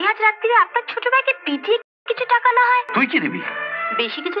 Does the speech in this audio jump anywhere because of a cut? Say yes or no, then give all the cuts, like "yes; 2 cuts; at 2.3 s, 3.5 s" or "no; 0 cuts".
yes; 1 cut; at 2.9 s